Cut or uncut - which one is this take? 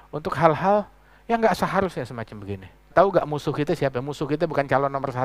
cut